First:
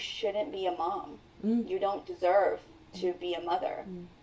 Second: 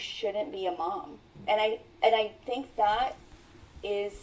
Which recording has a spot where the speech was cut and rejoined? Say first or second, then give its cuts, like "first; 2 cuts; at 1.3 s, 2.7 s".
second; 1 cut; at 1.3 s